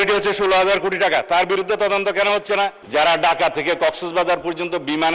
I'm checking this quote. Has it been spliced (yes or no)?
yes